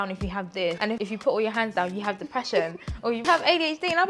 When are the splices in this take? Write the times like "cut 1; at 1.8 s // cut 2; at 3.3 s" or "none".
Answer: cut 1; at 0.9 s // cut 2; at 3.2 s

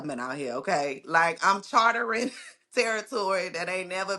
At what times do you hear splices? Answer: none

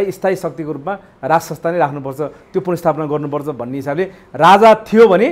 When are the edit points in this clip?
none

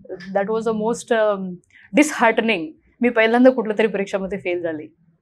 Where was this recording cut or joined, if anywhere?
none

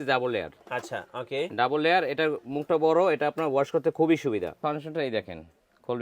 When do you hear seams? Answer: cut 1; at 4.6 s

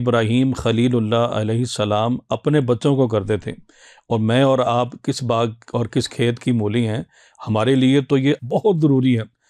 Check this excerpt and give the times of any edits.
none

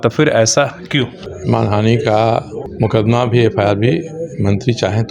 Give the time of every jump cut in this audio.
cut 1; at 1.3 s // cut 2; at 2.7 s

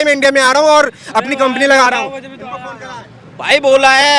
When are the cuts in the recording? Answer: none

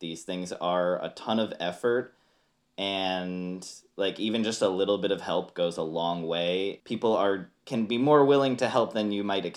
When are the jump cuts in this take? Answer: cut 1; at 6.8 s // cut 2; at 7.5 s

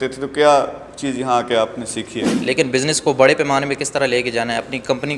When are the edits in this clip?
cut 1; at 2.3 s

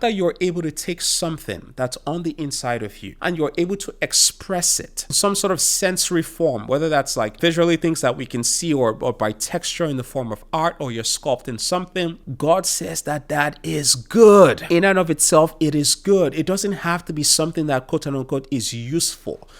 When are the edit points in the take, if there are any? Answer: cut 1; at 3.0 s // cut 2; at 5.2 s // cut 3; at 7.4 s // cut 4; at 12.2 s // cut 5; at 14.6 s

